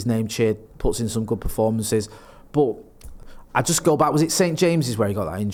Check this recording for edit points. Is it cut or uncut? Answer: uncut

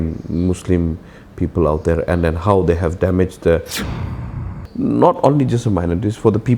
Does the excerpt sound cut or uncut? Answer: cut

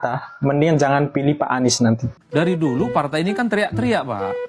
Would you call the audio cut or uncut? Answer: cut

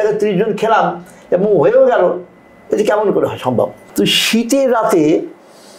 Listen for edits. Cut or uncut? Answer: cut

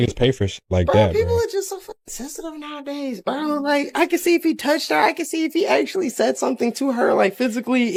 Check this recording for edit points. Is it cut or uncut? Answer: uncut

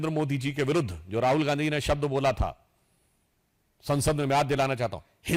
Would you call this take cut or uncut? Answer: uncut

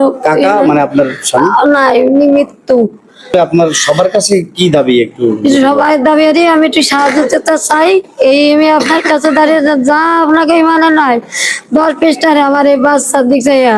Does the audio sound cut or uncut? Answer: cut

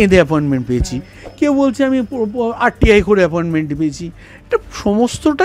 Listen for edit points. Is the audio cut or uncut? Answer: uncut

